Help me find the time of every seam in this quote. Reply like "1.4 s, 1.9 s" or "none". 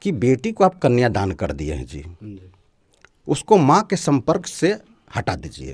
none